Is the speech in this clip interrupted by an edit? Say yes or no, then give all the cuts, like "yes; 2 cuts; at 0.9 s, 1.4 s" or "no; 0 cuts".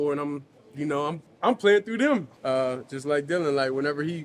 yes; 2 cuts; at 1.3 s, 2.3 s